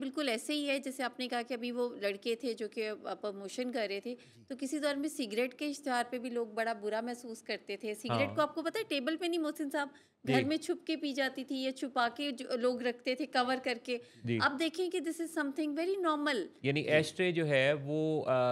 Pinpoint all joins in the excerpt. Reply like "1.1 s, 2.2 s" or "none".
none